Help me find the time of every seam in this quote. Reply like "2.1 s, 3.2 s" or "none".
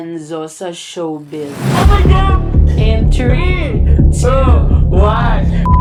none

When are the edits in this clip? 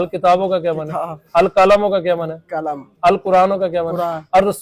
none

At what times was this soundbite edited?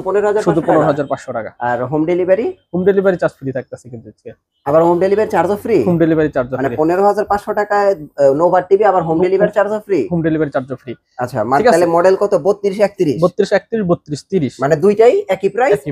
none

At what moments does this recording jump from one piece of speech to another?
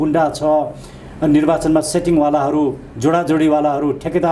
none

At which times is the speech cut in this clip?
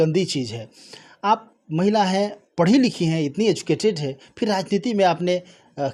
none

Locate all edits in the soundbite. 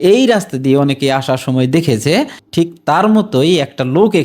none

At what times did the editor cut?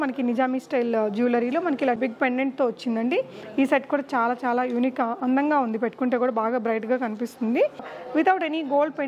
2.0 s, 7.9 s

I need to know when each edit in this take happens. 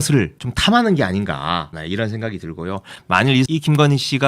1.7 s

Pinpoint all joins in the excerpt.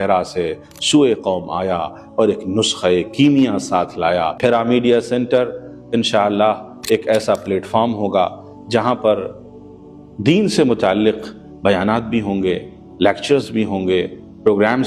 4.3 s

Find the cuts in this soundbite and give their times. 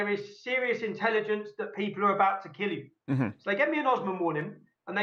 none

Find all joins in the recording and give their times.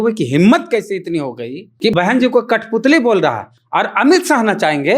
1.9 s

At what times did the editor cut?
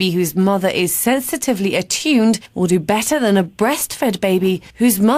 none

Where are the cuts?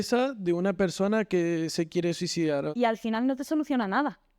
2.7 s

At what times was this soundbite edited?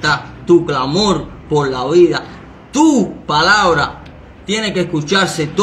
none

